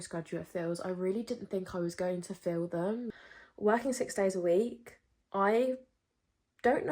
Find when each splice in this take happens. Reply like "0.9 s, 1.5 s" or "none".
3.1 s

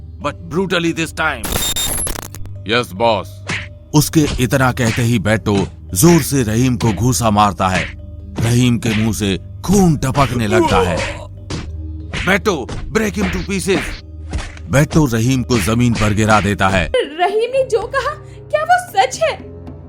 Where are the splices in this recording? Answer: 16.9 s

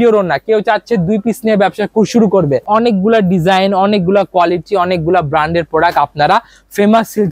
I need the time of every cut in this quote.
2.6 s

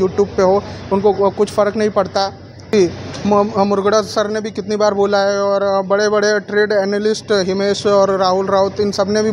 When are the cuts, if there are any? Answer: 2.7 s

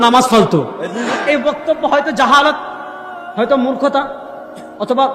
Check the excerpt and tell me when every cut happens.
1.1 s

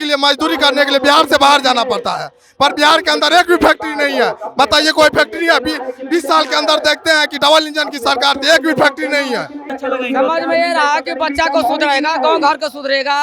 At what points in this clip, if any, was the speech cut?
9.7 s

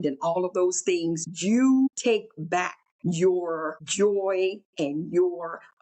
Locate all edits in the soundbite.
1.3 s, 2.4 s, 3.8 s, 4.7 s

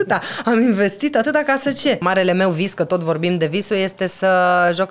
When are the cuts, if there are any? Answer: 2.0 s

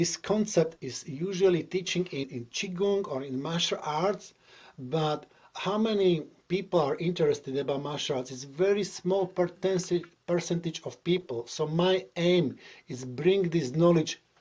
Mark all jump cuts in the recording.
2.3 s, 6.3 s

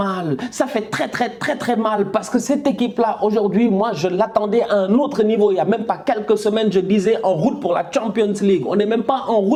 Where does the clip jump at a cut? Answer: none

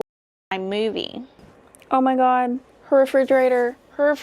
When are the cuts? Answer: 1.5 s

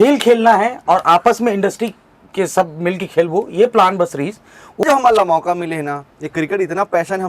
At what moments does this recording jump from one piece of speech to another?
4.8 s

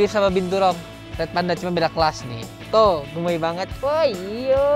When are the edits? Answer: none

